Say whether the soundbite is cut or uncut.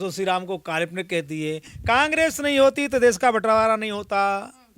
cut